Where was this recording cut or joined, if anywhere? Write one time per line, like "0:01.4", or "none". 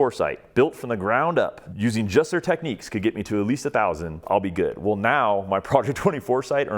0:01.6
0:04.2